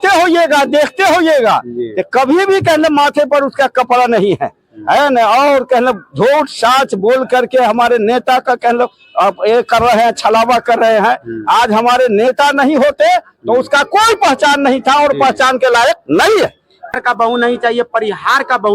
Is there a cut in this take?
yes; 1 cut; at 17.0 s

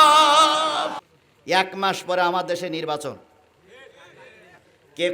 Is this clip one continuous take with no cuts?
no; 1 cut; at 1.1 s

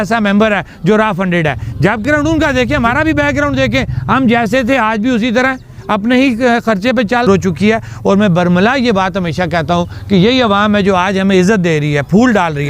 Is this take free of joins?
no; 2 cuts; at 2.0 s, 7.3 s

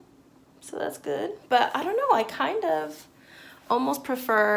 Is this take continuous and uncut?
yes; 0 cuts

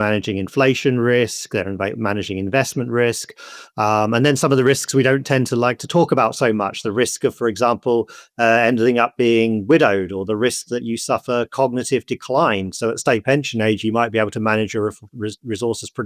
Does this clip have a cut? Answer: no; 0 cuts

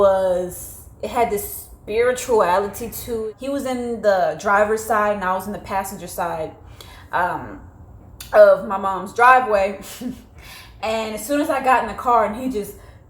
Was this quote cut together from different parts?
yes; 1 cut; at 3.2 s

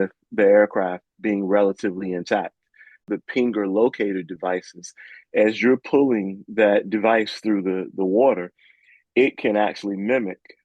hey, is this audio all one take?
no; 1 cut; at 3.1 s

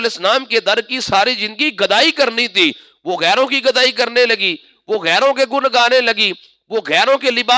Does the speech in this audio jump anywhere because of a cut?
no; 0 cuts

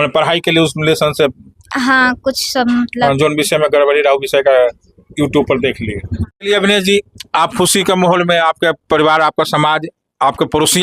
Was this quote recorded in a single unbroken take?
no; 1 cut; at 6.5 s

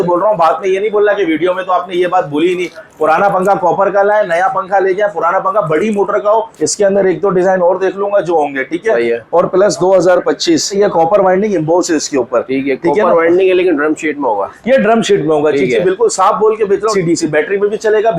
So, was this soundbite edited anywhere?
yes; 3 cuts; at 6.5 s, 10.7 s, 16.9 s

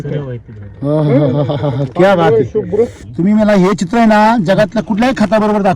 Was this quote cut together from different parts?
yes; 1 cut; at 3.0 s

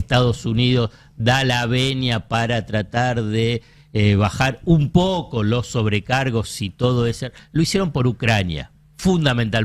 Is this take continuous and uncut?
yes; 0 cuts

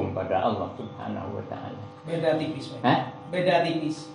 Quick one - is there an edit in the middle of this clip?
no; 0 cuts

